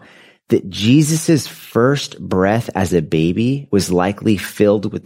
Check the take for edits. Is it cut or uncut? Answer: cut